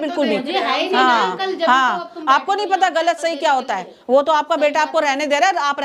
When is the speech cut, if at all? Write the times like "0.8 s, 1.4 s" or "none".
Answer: none